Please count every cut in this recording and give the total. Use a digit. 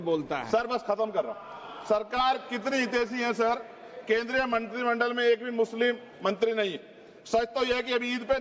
0